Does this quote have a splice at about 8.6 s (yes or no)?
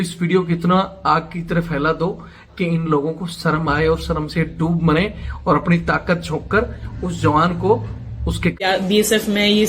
yes